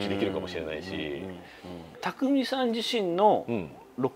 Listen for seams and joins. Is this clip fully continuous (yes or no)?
no